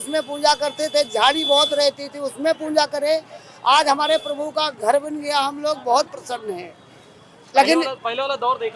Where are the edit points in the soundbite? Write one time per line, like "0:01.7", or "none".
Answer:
none